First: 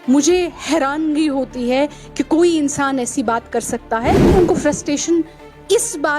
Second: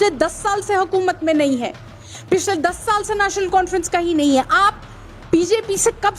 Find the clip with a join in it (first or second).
first